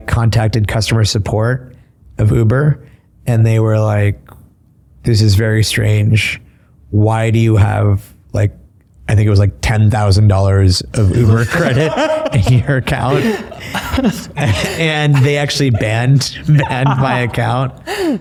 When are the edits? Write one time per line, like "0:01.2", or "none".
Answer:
none